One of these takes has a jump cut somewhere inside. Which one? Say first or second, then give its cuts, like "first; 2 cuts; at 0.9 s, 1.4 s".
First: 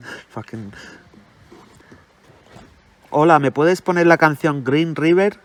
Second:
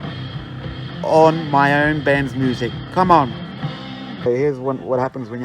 second; 1 cut; at 4.3 s